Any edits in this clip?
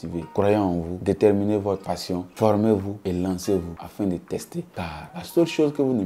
no; 0 cuts

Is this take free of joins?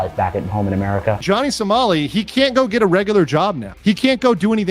no; 1 cut; at 1.2 s

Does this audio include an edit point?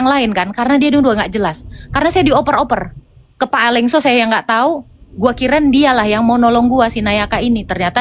no; 0 cuts

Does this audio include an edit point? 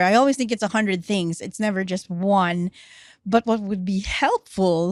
no; 0 cuts

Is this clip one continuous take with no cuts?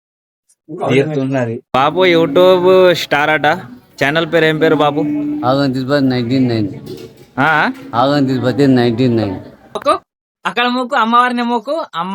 no; 2 cuts; at 1.6 s, 9.8 s

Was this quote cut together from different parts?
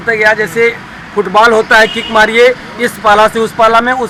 no; 0 cuts

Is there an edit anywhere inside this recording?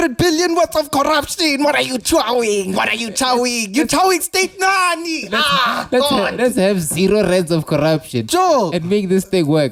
no; 0 cuts

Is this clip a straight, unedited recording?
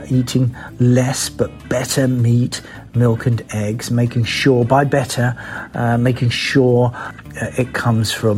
no; 1 cut; at 7.1 s

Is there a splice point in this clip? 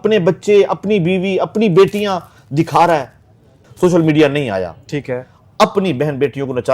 yes; 1 cut; at 3.6 s

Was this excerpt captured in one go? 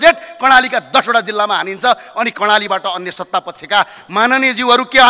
yes; 0 cuts

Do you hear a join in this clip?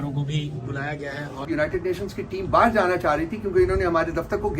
yes; 1 cut; at 1.4 s

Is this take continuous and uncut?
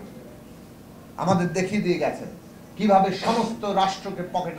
yes; 0 cuts

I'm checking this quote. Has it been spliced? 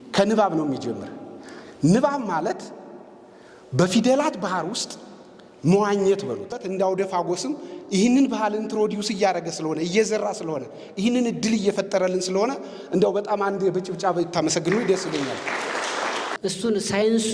yes; 2 cuts; at 6.6 s, 16.3 s

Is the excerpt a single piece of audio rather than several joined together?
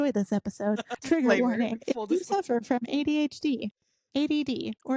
no; 1 cut; at 0.9 s

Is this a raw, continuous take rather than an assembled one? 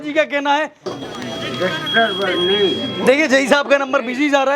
no; 1 cut; at 0.9 s

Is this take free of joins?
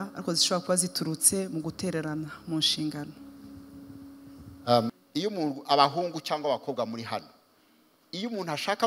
no; 1 cut; at 5.0 s

